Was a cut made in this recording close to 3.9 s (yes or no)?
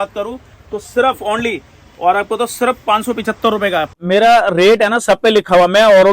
yes